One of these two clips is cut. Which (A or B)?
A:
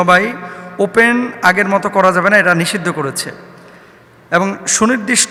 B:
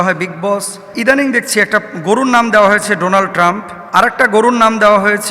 B